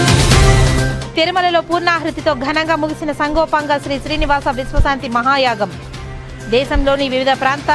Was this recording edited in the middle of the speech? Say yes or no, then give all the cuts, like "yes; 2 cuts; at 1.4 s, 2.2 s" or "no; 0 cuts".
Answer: no; 0 cuts